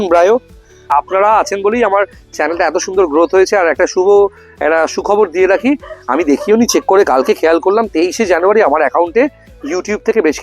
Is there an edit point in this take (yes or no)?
yes